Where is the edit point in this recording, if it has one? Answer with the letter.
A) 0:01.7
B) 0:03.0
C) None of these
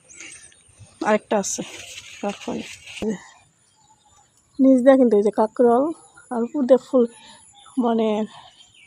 B